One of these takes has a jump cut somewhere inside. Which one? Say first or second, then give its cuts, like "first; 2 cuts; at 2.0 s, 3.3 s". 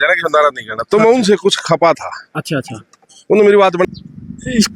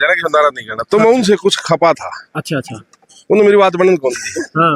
first; 1 cut; at 3.8 s